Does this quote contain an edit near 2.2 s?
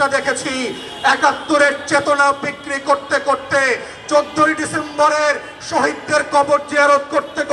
no; 0 cuts

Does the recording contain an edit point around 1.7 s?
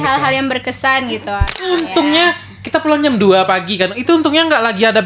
yes; 1 cut; at 1.7 s

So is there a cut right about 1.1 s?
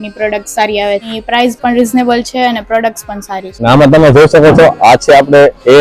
yes; 2 cuts; at 1.1 s, 3.6 s

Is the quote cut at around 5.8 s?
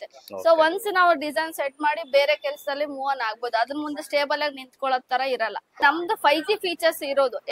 yes; 1 cut; at 5.8 s

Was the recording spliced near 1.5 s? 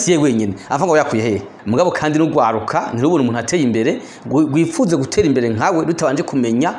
yes; 1 cut; at 1.5 s

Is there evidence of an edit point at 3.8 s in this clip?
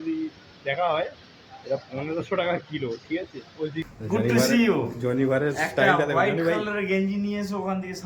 yes; 1 cut; at 3.8 s

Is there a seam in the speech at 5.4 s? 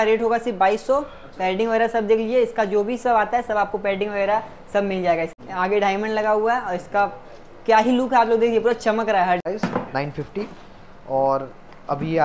yes; 2 cuts; at 5.4 s, 9.4 s

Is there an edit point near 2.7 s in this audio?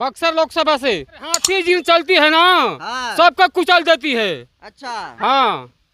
no; 1 cut; at 1.5 s

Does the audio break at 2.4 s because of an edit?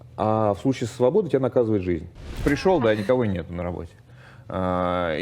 yes; 1 cut; at 2.4 s

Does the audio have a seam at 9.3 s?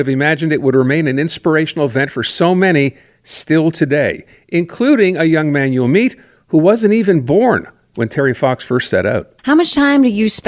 yes; 1 cut; at 9.3 s

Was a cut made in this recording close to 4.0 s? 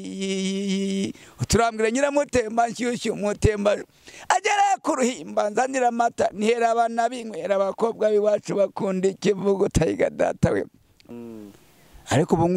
no; 1 cut; at 11.0 s

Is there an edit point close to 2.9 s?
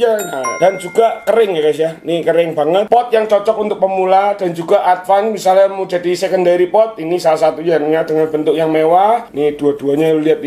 yes; 2 cuts; at 2.9 s, 9.3 s

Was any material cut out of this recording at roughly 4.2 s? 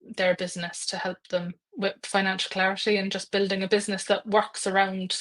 no; 1 cut; at 1.6 s

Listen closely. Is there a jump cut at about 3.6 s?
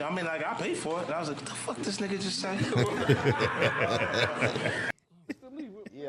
no; 1 cut; at 4.9 s

